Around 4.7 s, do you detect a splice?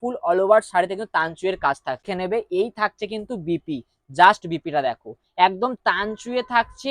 no; 1 cut; at 2.1 s

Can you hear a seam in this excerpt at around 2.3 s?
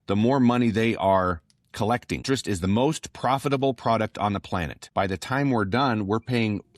yes; 2 cuts; at 2.3 s, 4.8 s

